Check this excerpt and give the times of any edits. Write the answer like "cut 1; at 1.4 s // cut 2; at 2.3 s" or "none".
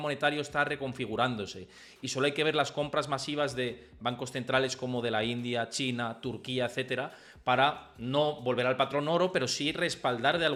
none